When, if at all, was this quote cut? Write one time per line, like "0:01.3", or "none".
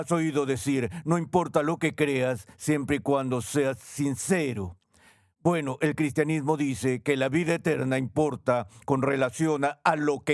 none